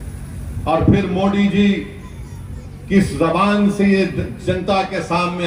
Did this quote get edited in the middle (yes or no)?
no